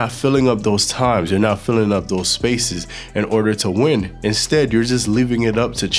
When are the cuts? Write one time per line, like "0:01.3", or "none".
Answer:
none